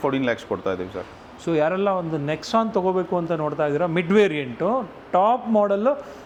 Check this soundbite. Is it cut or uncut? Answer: uncut